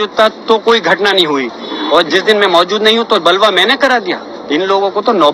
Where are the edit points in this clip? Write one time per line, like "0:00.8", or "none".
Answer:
none